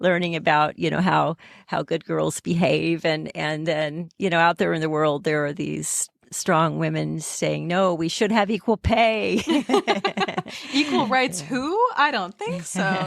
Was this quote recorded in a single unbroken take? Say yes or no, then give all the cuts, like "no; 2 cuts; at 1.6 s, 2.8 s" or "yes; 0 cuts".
no; 1 cut; at 9.6 s